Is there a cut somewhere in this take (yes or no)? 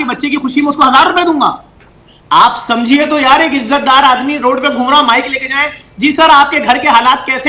yes